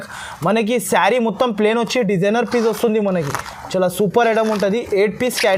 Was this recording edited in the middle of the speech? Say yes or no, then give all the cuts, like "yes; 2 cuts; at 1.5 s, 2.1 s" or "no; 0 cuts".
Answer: no; 0 cuts